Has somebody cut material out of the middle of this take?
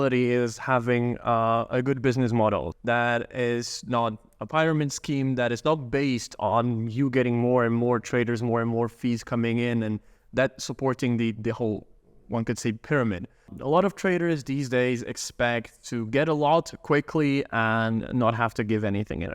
yes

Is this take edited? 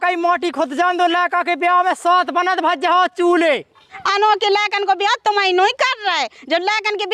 yes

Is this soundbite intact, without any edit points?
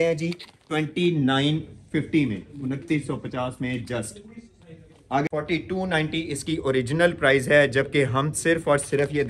no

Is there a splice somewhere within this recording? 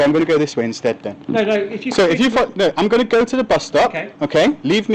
no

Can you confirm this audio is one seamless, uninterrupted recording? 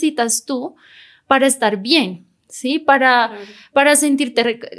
yes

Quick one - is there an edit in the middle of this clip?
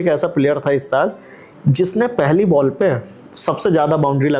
no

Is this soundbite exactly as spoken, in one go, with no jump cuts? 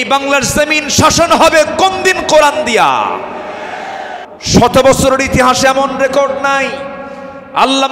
no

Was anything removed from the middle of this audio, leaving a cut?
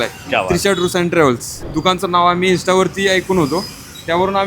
yes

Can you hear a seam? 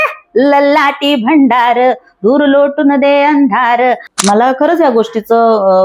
yes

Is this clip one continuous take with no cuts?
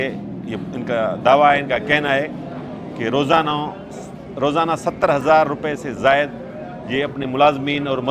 yes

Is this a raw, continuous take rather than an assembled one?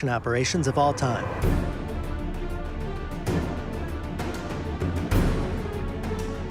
yes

